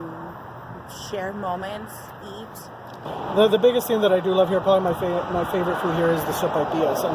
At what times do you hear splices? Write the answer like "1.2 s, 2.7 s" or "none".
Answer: 3.1 s